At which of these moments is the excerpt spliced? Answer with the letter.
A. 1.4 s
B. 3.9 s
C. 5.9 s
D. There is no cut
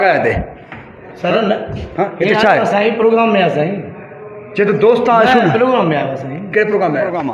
D